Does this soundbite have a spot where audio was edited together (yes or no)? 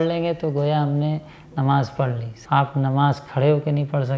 yes